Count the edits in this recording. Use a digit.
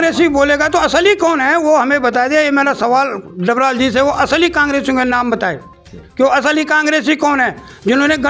0